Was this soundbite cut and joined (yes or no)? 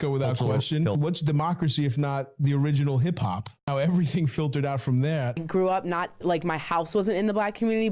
yes